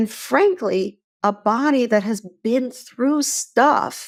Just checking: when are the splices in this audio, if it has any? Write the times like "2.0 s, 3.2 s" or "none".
none